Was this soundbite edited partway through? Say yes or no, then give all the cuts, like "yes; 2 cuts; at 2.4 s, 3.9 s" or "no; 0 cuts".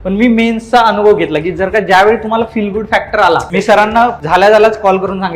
yes; 2 cuts; at 3.5 s, 4.2 s